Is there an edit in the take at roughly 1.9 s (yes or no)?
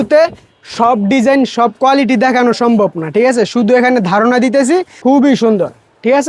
no